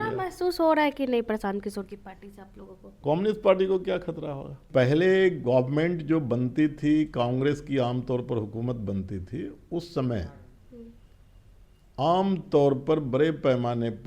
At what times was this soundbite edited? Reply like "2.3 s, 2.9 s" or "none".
3.0 s, 4.7 s